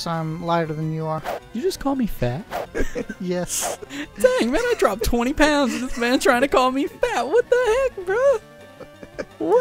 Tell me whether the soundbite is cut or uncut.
cut